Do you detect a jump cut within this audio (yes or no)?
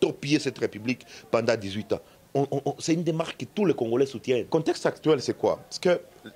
yes